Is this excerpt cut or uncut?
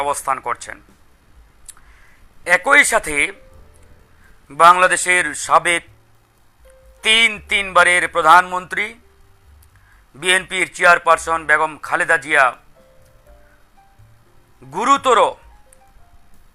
uncut